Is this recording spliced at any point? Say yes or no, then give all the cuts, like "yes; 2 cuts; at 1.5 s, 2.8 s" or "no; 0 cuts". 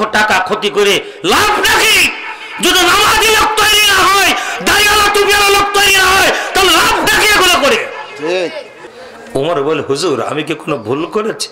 yes; 1 cut; at 8.7 s